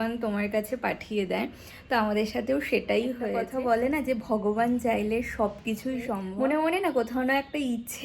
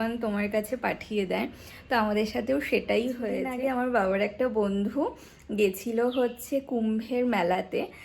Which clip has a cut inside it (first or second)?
first